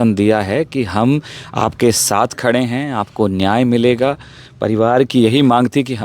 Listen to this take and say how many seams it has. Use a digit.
0